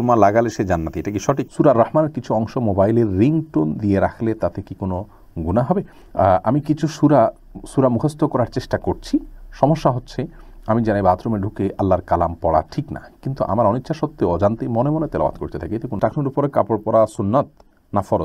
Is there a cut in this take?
yes; 3 cuts; at 1.4 s, 6.0 s, 15.9 s

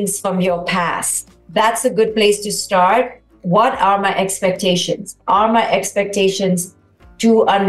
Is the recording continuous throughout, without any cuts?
no; 1 cut; at 1.2 s

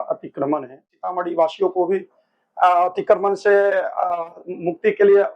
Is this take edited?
yes; 1 cut; at 1.0 s

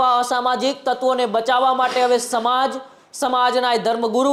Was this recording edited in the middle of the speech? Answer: no; 0 cuts

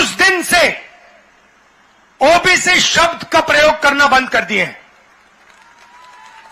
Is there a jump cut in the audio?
no; 0 cuts

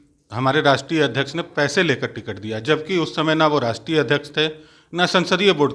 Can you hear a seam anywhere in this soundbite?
no; 0 cuts

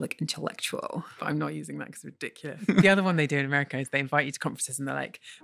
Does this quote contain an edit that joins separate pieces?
yes; 2 cuts; at 1.1 s, 2.7 s

